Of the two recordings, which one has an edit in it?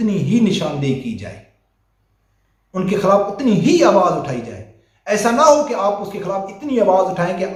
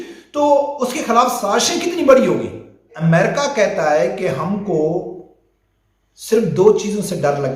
second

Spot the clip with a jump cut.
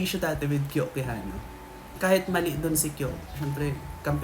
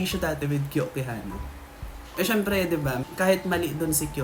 first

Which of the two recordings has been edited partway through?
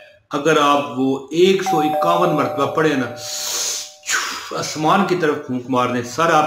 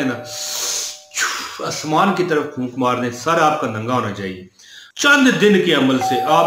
second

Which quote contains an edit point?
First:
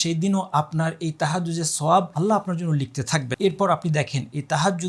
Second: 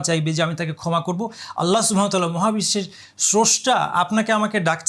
first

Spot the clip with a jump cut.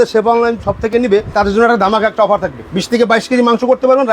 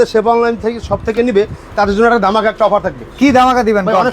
first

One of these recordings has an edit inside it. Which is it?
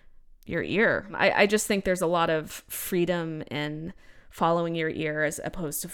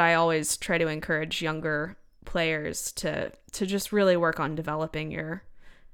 first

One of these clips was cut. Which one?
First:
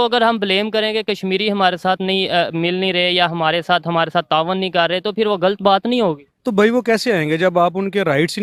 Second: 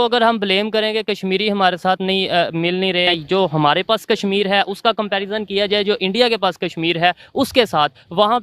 second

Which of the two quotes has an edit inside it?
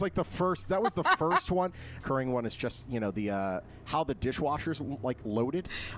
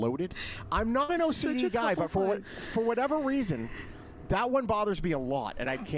first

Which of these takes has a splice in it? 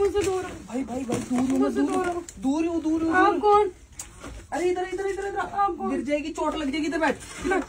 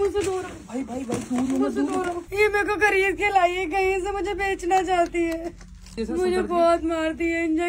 second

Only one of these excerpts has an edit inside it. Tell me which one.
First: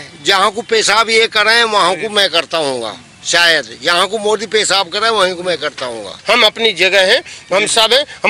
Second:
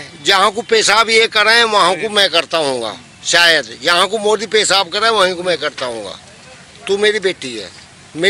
first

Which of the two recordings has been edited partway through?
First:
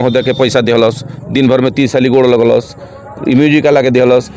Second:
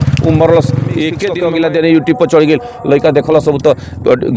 second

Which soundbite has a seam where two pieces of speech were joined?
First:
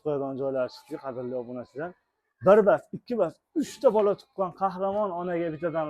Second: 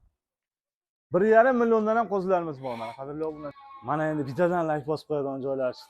second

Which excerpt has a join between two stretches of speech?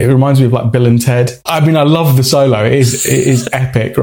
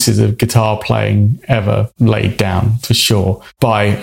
first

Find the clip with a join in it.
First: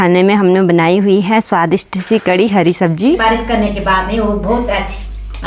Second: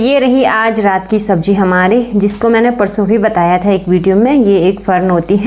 first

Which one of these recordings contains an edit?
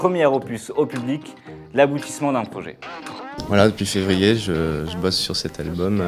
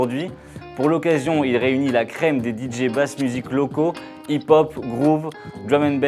first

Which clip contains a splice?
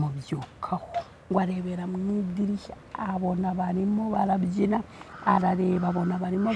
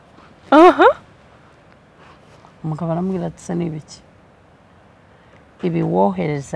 first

